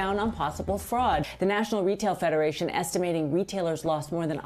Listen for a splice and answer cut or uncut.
cut